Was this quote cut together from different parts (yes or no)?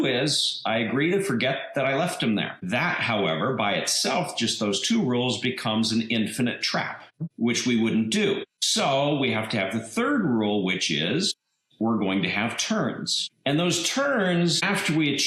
yes